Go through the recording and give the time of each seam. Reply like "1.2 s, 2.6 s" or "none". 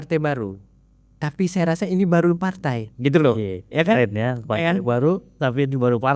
none